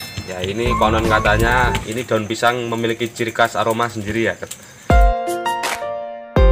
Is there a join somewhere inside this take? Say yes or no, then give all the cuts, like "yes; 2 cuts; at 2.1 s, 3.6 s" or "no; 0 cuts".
yes; 1 cut; at 4.7 s